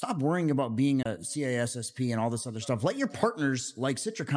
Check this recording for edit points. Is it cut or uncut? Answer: cut